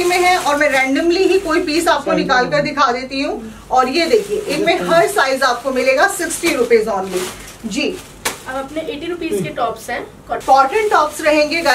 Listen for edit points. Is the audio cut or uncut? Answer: uncut